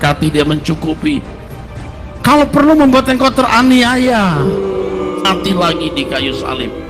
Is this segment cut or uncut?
cut